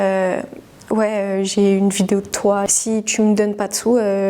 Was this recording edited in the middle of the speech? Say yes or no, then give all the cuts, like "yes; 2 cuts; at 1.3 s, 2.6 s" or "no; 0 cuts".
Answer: yes; 1 cut; at 2.7 s